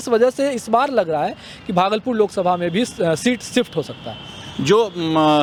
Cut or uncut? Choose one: uncut